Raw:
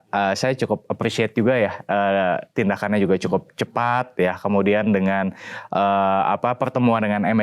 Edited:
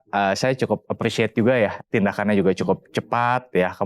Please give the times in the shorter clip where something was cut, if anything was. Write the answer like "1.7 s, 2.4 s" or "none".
1.8 s